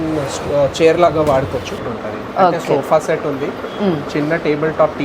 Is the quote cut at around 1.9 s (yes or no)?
yes